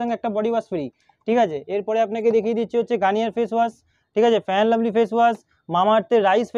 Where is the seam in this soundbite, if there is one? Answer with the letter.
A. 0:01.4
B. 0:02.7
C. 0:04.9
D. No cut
D